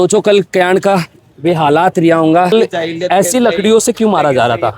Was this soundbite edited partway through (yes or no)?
yes